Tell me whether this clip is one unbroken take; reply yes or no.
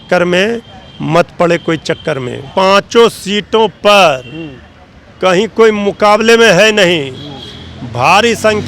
no